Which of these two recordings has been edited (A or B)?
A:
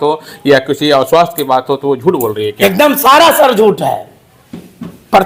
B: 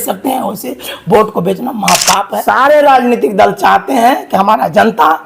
B